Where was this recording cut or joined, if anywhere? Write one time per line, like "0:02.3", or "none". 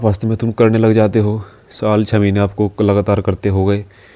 none